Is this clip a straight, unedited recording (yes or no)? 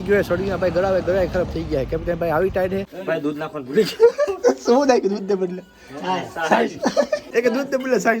no